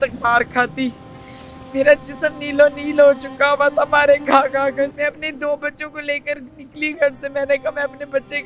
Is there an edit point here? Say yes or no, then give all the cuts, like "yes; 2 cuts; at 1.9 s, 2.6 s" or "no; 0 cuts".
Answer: yes; 1 cut; at 4.9 s